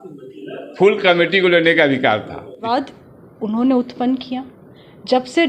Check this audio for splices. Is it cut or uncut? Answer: cut